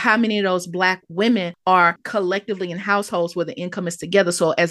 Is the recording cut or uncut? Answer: cut